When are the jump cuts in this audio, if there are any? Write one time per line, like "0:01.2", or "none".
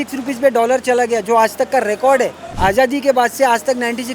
0:02.4